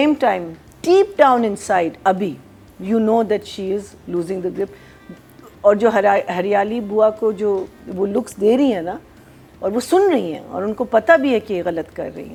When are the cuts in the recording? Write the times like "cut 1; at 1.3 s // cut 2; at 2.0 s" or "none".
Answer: none